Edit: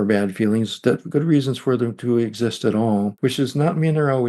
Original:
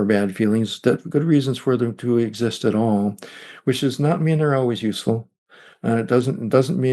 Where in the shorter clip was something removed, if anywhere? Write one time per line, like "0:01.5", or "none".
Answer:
0:03.1

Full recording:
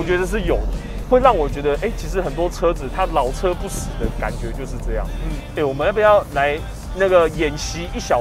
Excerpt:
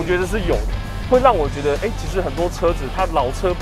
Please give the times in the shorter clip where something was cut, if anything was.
none

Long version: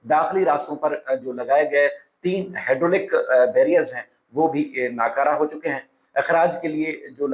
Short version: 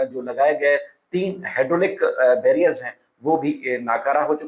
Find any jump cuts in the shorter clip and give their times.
none

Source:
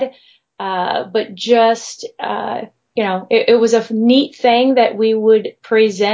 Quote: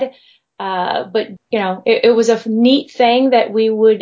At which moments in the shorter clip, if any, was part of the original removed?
0:01.3

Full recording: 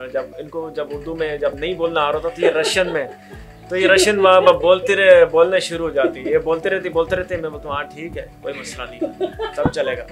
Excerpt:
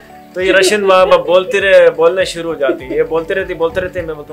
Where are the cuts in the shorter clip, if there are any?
none

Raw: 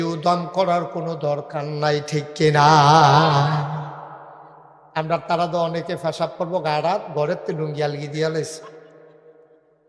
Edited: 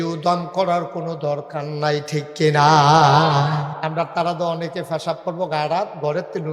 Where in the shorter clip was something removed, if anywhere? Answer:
0:03.7

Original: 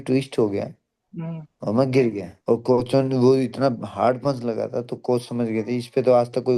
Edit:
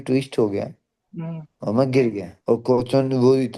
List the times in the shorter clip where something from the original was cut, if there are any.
none

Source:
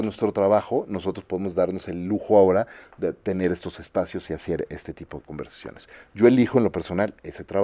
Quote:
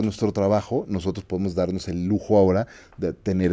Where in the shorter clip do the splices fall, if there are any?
none

